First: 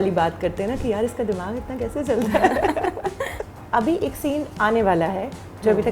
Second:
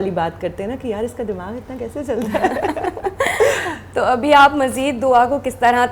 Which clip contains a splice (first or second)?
first